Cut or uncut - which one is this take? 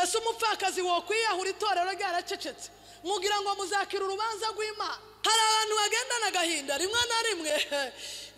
cut